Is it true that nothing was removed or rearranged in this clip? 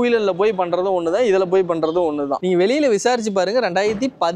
no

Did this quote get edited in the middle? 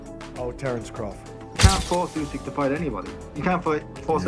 yes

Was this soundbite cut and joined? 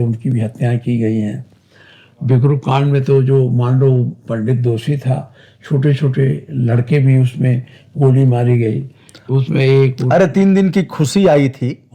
no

